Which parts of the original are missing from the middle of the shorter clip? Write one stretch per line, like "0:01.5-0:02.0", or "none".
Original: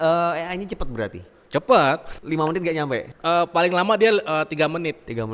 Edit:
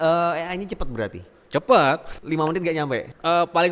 none